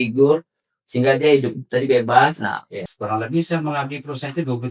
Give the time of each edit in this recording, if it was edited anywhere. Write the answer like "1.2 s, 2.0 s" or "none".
2.8 s